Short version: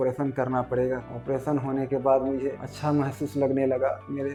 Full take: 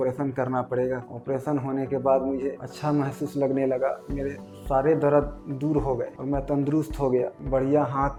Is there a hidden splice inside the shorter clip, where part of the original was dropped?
no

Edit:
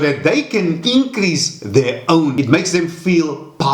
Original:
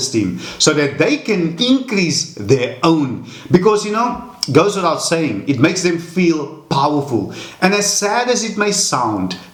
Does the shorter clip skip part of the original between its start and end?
yes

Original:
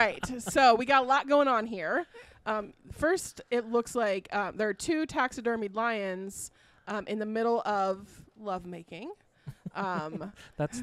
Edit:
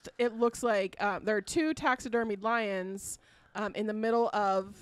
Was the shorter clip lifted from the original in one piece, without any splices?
yes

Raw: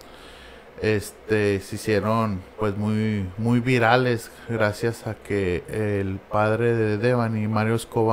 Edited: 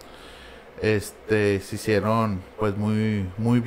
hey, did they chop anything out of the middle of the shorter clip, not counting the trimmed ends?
no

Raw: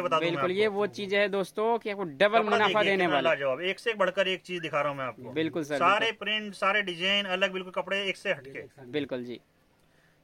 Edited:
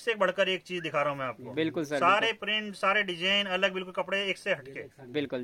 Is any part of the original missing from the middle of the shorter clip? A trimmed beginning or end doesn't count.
no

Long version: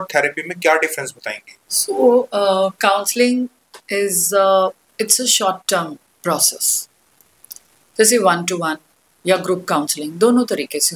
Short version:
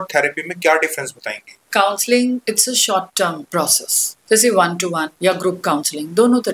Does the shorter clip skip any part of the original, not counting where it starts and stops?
yes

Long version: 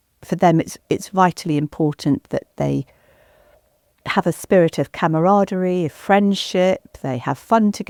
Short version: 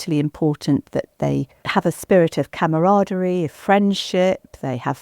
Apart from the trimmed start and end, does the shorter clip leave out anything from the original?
yes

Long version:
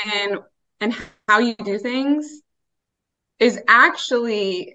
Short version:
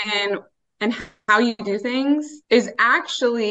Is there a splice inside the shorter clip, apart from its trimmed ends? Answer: yes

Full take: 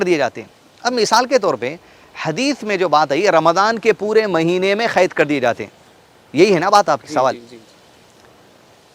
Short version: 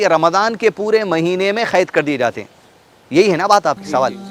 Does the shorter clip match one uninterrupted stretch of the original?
yes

